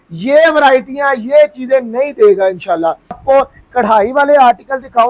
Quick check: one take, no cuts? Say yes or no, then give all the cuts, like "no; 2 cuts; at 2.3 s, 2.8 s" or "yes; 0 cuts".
no; 1 cut; at 3.2 s